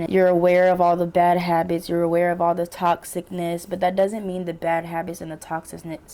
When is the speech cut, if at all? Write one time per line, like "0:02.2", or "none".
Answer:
none